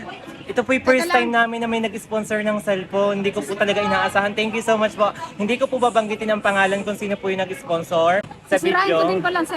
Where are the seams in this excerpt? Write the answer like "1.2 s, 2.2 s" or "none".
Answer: 8.3 s

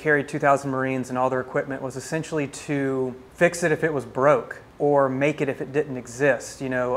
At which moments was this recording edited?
3.2 s, 4.6 s

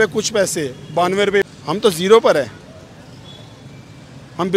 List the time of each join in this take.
1.5 s

